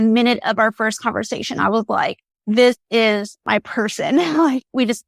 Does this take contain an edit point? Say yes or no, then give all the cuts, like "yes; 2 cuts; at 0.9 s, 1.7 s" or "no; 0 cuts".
no; 0 cuts